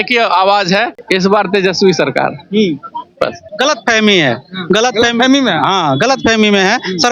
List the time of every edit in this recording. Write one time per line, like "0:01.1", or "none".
0:01.0
0:03.4

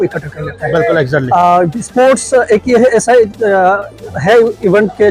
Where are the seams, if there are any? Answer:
none

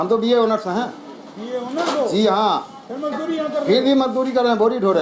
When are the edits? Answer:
none

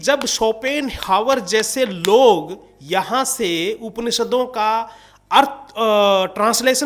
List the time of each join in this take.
none

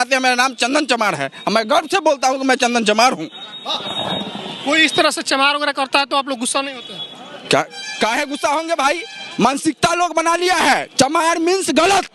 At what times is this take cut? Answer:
none

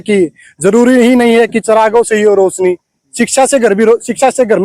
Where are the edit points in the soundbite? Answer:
none

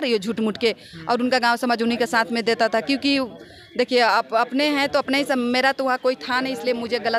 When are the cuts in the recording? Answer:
none

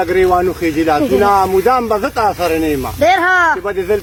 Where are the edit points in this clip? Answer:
none

